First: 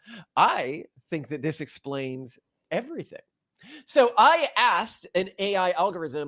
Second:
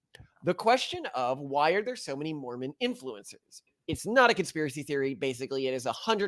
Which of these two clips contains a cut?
second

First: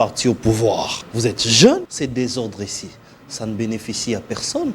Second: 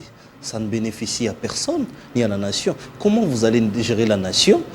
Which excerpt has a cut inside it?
first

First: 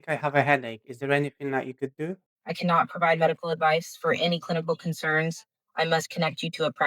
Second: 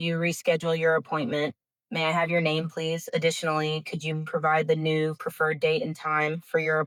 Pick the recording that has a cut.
first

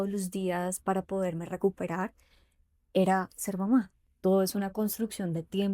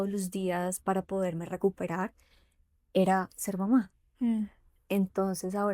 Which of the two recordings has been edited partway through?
first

